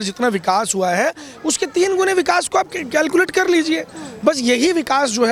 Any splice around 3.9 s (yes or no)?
no